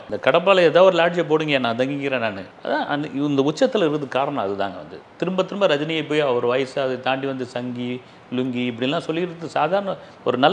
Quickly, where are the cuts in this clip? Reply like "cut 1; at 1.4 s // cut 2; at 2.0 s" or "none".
none